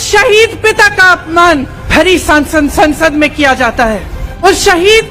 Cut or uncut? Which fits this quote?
cut